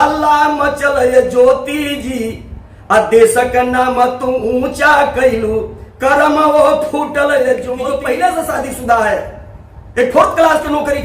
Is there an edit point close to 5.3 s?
no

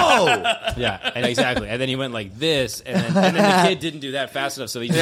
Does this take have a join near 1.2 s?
yes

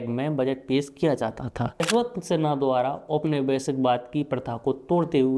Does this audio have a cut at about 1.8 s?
yes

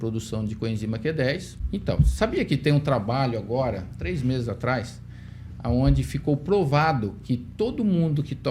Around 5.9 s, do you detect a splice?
no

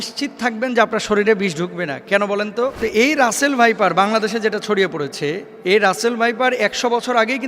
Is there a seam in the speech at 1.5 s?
no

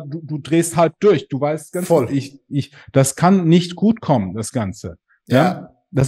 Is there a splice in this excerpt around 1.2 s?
no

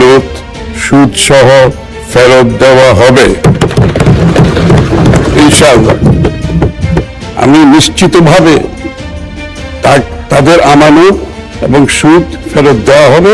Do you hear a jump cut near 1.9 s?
no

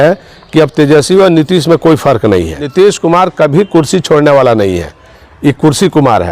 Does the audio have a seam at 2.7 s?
yes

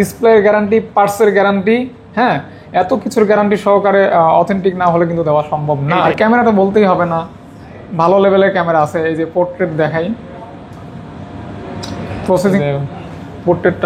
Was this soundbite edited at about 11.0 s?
no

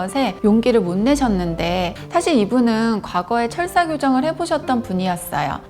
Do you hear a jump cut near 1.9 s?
yes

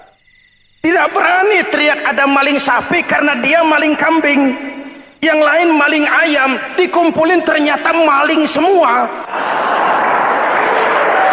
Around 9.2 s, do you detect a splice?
yes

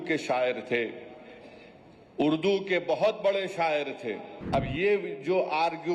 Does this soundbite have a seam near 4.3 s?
yes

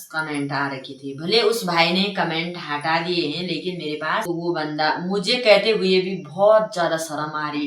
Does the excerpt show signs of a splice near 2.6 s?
no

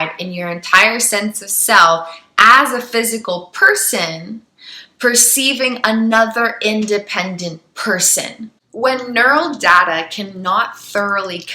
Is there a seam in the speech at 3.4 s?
no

